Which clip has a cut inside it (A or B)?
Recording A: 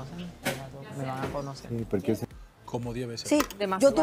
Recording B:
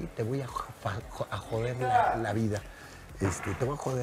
A